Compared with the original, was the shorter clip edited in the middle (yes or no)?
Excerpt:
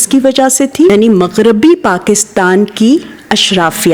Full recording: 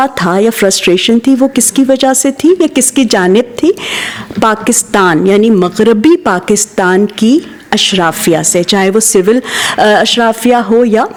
yes